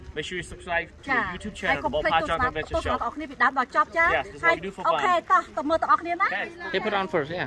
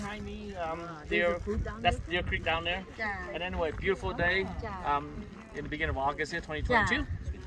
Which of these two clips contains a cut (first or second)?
first